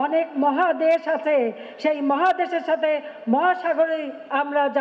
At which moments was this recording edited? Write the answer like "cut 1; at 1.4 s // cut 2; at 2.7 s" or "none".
none